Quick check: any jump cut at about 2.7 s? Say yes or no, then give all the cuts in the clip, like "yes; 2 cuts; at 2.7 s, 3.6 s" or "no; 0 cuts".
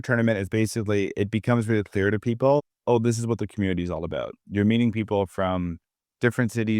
no; 0 cuts